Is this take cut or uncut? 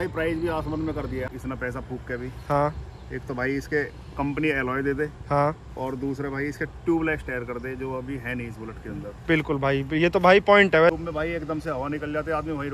cut